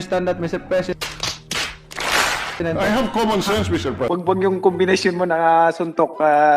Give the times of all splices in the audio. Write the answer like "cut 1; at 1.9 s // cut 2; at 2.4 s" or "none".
cut 1; at 4.0 s